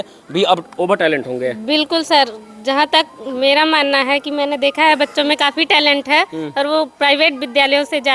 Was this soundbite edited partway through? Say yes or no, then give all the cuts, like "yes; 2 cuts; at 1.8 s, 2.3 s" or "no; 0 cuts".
no; 0 cuts